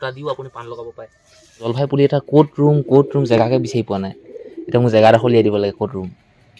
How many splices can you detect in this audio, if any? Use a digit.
1